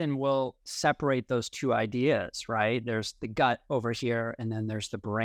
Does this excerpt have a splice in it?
no; 0 cuts

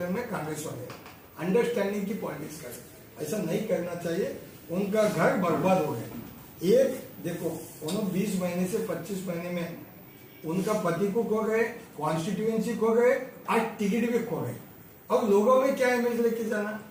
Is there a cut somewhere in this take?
no; 0 cuts

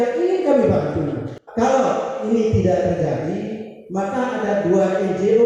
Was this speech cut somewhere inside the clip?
yes; 1 cut; at 1.4 s

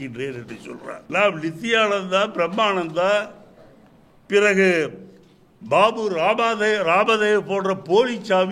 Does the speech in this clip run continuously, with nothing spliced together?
no; 1 cut; at 1.0 s

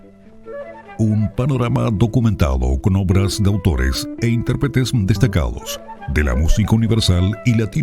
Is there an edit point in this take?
yes; 1 cut; at 1.0 s

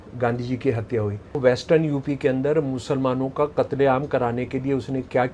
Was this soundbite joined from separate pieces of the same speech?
yes; 1 cut; at 1.4 s

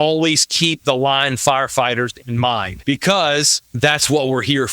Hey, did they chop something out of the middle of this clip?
yes; 2 cuts; at 2.7 s, 3.6 s

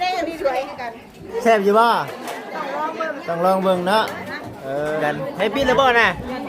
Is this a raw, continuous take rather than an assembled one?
no; 1 cut; at 5.0 s

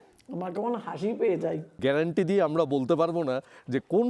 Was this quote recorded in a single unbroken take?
no; 1 cut; at 1.8 s

